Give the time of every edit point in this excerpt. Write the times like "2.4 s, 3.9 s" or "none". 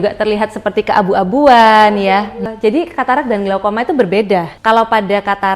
2.5 s, 4.5 s

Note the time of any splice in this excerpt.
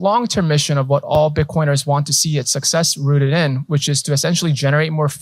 none

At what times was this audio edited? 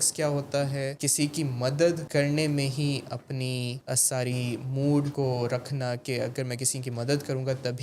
1.0 s, 2.0 s, 3.8 s, 5.1 s

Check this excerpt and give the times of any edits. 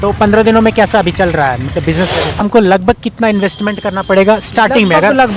2.4 s

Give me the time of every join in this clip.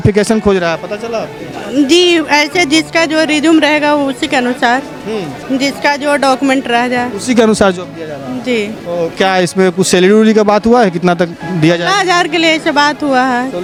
none

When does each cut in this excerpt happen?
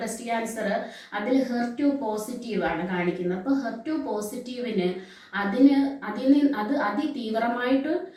none

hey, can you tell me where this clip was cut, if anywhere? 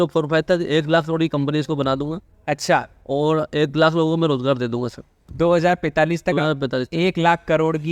none

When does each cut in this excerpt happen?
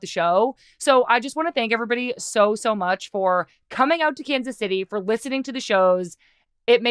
none

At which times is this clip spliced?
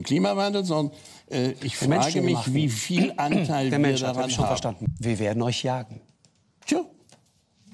4.9 s

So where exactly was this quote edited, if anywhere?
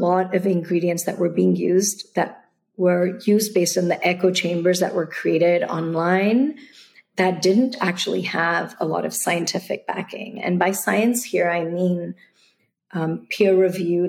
none

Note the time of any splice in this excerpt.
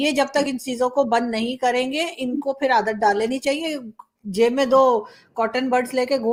none

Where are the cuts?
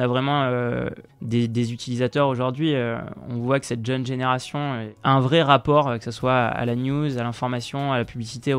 1.0 s, 4.9 s

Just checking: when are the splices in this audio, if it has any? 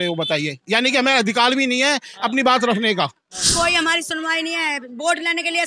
3.5 s

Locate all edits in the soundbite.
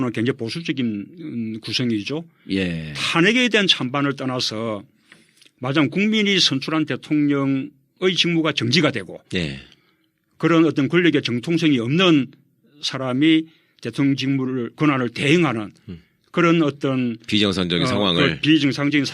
15.9 s

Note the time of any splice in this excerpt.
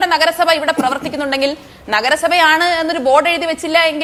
none

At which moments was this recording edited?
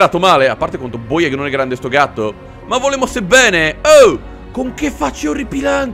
2.4 s

